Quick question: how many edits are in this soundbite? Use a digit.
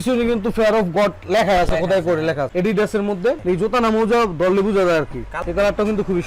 2